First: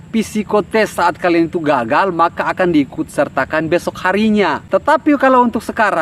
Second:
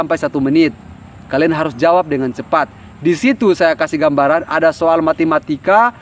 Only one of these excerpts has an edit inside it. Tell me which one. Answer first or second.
first